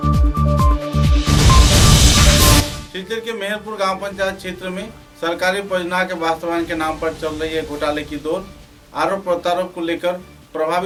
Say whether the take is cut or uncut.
uncut